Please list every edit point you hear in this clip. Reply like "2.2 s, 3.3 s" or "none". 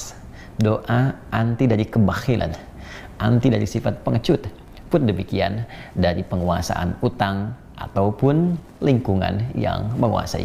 none